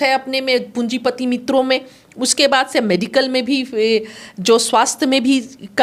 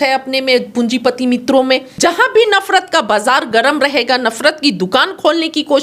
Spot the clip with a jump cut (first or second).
second